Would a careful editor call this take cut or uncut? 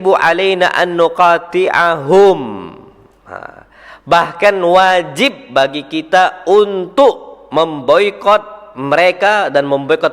uncut